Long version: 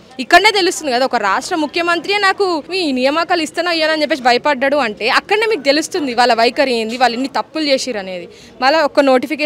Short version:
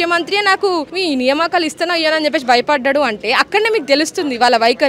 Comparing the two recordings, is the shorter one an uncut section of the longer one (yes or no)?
yes